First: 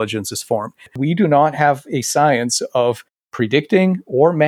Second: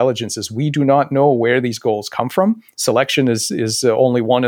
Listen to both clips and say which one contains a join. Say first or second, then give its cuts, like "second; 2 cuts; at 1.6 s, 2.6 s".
first; 1 cut; at 1.0 s